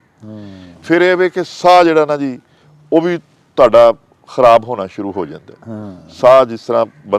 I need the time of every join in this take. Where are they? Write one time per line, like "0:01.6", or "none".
none